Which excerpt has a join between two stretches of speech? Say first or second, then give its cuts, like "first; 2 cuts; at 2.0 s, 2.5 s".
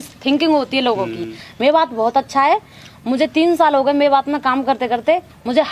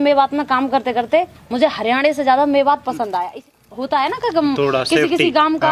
second; 1 cut; at 3.4 s